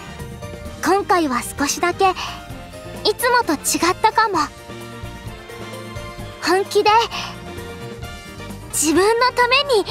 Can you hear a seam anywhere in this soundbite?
no; 0 cuts

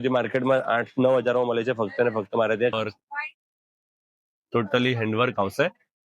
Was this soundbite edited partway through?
yes; 1 cut; at 2.7 s

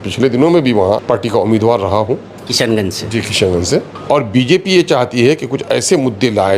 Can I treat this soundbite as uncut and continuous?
no; 2 cuts; at 1.0 s, 3.9 s

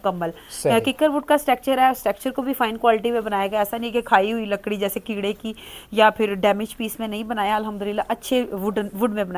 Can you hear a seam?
no; 0 cuts

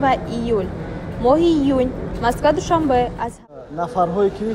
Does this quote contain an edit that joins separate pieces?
yes; 1 cut; at 3.5 s

